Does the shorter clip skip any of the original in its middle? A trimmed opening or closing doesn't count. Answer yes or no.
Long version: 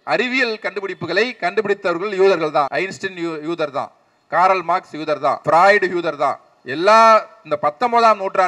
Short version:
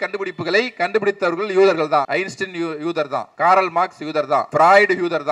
yes